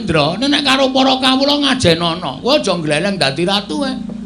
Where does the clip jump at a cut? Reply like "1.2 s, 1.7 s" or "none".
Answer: none